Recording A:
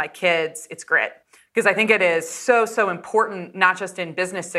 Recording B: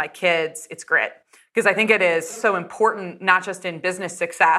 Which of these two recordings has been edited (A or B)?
B